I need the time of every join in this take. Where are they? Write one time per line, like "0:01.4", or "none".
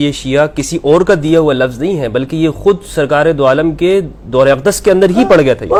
none